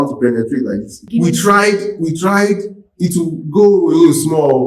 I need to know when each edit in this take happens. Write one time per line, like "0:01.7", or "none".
0:01.0